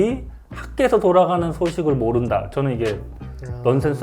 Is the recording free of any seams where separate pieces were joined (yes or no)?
yes